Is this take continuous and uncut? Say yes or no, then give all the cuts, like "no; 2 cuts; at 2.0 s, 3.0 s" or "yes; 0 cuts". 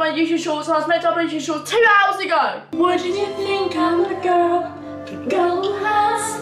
no; 1 cut; at 2.7 s